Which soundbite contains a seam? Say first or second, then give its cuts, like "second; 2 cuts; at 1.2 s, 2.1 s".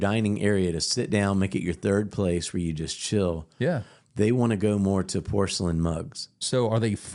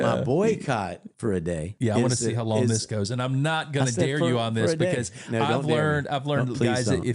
second; 1 cut; at 1.1 s